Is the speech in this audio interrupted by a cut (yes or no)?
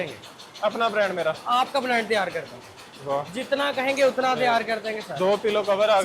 no